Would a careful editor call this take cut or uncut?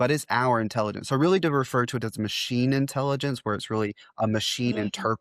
uncut